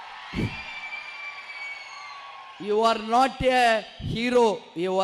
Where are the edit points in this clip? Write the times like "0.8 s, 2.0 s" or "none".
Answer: none